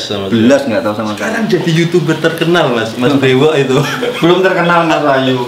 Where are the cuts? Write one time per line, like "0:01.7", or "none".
0:01.1